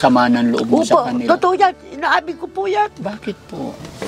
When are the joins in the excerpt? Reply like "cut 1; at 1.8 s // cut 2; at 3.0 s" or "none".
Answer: none